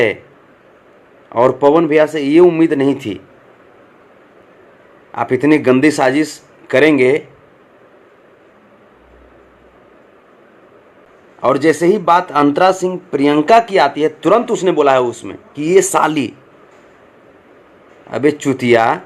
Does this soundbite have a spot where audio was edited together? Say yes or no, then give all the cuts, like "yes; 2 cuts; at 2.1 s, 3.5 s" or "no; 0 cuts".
yes; 2 cuts; at 4.4 s, 11.1 s